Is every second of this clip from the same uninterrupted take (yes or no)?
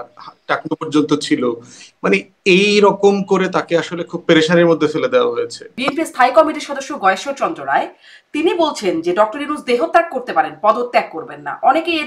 no